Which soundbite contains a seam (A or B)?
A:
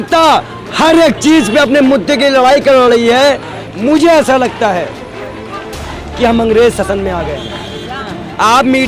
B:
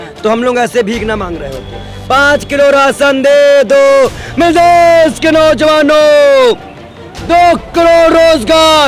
A